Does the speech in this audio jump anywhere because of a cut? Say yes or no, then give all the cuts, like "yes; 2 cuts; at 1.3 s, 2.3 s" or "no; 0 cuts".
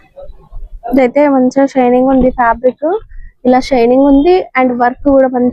no; 0 cuts